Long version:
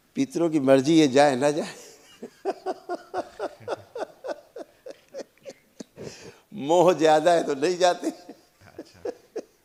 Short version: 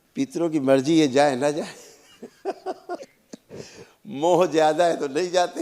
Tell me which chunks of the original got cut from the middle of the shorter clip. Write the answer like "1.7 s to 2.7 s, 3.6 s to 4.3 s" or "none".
3.1 s to 5.5 s

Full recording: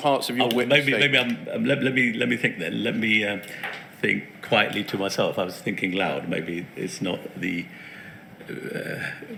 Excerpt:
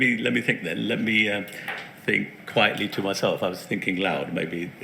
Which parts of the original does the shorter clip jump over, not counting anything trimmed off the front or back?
none

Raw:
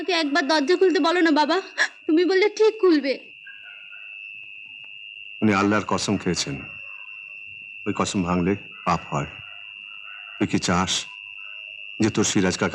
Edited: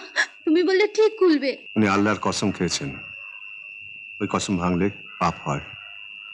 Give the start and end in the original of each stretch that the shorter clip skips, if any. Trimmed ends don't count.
3.3 s to 5.3 s

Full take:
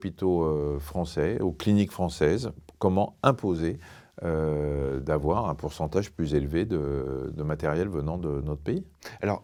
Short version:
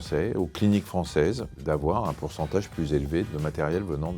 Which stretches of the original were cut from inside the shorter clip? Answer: 2.6 s to 5.0 s, 6.7 s to 7.3 s

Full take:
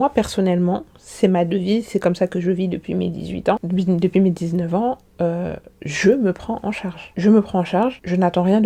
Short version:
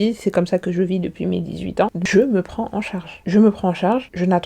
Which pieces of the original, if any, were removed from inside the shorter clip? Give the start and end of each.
3.7 s to 5.9 s

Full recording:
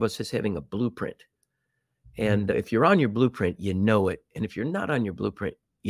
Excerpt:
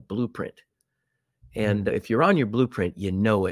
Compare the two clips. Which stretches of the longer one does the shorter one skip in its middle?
none

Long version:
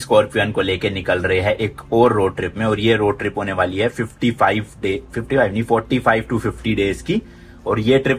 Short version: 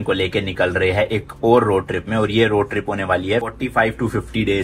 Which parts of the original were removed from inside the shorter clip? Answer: 4.0 s to 5.8 s

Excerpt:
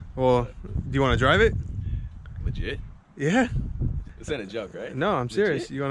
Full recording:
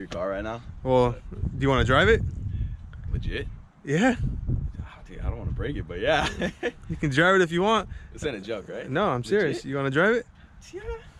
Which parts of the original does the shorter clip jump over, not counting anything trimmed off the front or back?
4.8 s to 8.0 s

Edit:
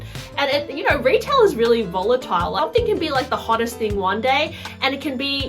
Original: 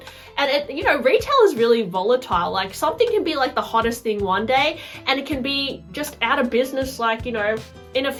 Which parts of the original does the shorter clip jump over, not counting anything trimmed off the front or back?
2.5 s to 2.8 s

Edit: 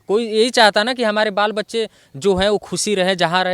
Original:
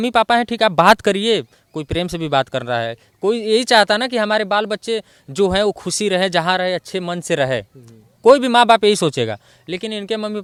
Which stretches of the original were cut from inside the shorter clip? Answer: none

